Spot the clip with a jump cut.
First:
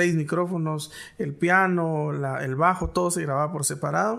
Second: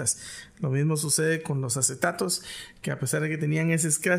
second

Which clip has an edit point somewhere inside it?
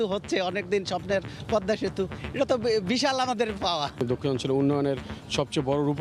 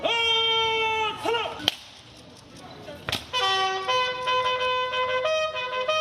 first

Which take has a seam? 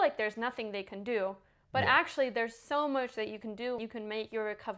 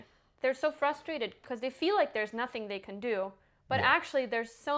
first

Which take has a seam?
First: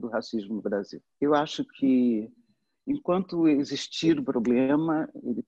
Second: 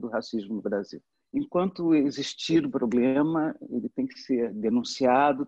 second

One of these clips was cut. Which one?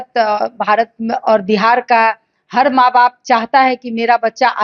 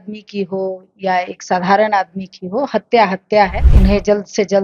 second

